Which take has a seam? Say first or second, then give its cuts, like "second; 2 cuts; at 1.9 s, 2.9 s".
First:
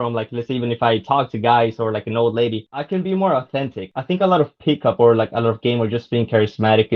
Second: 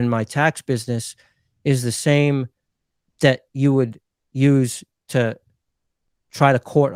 first; 2 cuts; at 2.7 s, 3.9 s